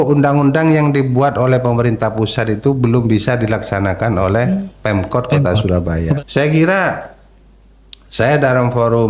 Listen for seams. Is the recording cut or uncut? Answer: cut